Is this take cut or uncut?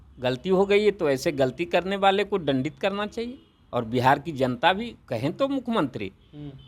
uncut